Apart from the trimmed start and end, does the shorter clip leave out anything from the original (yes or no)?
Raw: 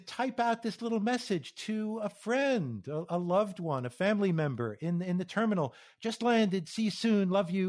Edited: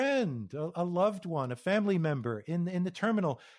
no